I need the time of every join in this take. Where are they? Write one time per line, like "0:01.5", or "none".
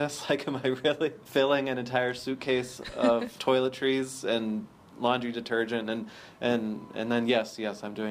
0:01.2
0:03.3